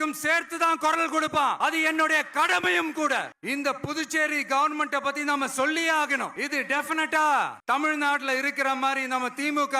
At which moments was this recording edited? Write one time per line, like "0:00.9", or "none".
0:01.6
0:03.4
0:06.4